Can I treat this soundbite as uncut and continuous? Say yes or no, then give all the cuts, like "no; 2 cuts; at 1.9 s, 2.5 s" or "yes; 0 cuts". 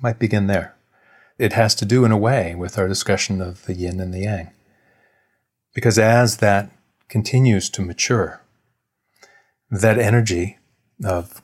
no; 1 cut; at 1.4 s